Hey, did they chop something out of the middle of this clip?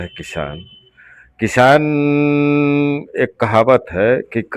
no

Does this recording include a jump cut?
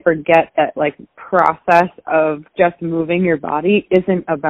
no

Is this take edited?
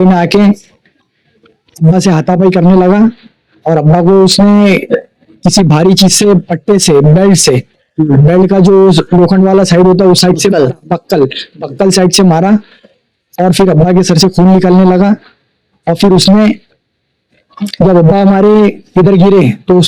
no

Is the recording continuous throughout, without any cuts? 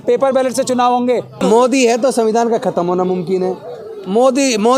no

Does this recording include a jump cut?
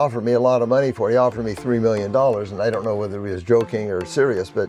no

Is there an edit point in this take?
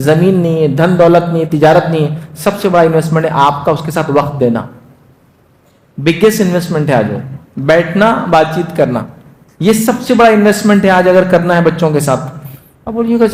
no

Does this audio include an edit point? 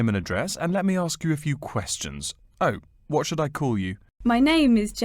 yes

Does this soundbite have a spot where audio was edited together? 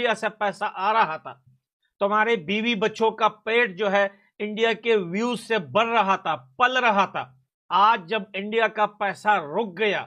no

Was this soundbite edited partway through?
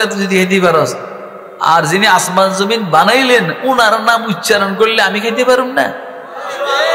no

